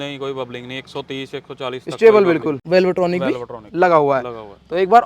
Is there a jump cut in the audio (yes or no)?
yes